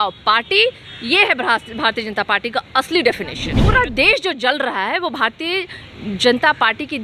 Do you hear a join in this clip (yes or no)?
yes